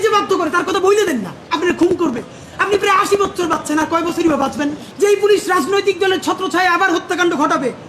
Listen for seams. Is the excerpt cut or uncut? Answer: cut